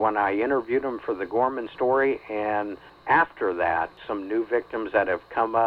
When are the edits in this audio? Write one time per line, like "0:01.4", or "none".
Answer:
0:03.0
0:04.0

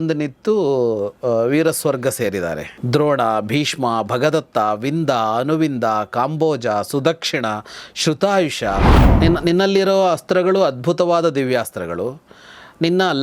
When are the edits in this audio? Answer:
0:09.0

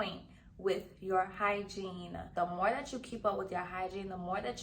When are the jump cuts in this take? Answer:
0:02.3

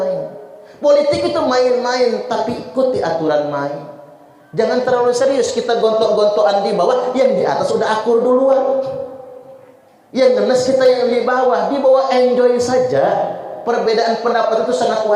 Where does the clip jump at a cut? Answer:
none

